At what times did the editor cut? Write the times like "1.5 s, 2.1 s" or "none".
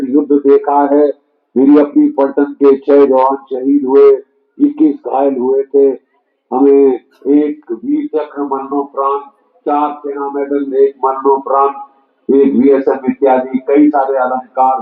none